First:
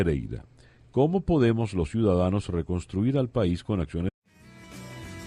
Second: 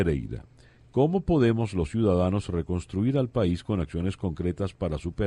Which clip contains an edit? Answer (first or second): second